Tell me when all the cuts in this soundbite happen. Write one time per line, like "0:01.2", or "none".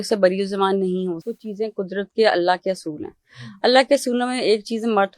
0:01.2